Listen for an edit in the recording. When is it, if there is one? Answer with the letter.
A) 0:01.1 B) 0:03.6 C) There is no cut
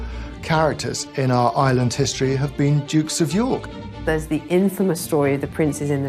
B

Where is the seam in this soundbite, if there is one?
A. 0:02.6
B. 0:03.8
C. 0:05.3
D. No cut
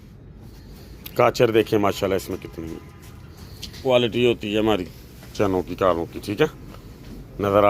B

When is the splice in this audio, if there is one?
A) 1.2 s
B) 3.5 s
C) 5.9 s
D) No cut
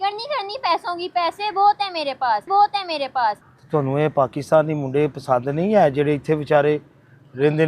B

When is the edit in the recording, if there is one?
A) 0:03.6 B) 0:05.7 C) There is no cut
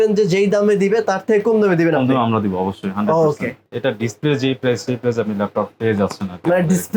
A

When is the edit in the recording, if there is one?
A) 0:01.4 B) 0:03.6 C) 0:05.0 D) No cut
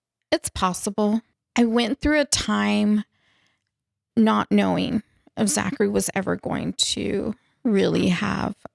A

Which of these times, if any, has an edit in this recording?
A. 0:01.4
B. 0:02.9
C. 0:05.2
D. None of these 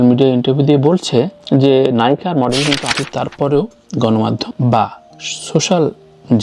B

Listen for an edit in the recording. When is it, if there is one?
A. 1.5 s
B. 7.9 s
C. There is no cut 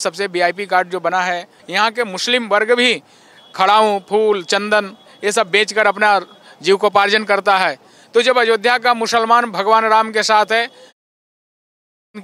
A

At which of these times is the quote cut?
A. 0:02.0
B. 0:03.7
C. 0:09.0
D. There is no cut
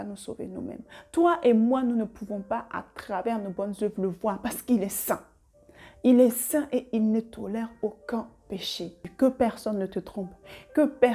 C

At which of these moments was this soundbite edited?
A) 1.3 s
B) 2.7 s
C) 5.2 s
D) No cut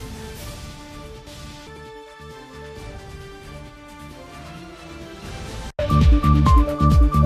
C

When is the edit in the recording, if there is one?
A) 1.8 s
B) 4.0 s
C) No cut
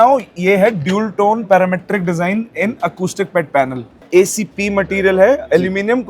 B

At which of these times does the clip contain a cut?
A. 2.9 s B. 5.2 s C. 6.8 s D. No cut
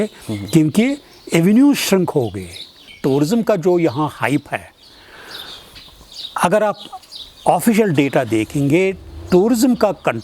A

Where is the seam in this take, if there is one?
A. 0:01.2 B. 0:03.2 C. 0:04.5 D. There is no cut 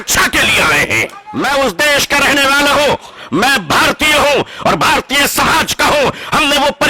A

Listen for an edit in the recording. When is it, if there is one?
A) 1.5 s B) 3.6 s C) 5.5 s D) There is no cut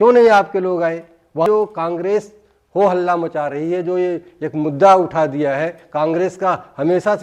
A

